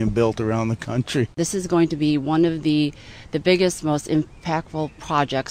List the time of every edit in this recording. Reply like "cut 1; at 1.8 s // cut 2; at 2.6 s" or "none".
cut 1; at 1.4 s